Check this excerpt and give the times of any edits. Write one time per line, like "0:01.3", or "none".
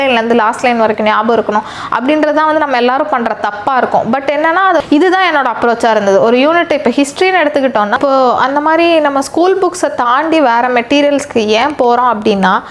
0:04.8
0:07.9